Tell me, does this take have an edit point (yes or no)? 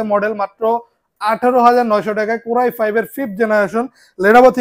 no